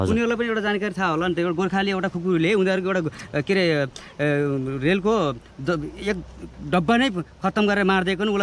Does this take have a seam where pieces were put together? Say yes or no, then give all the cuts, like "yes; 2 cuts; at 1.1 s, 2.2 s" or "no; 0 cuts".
no; 0 cuts